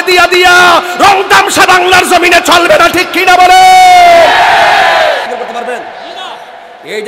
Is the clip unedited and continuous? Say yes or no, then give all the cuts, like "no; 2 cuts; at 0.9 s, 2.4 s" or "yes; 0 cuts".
no; 1 cut; at 5.3 s